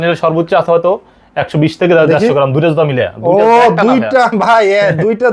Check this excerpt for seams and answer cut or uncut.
uncut